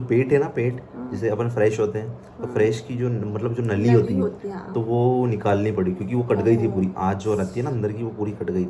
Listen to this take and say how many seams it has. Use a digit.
0